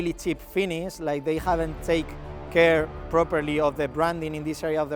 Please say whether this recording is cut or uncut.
uncut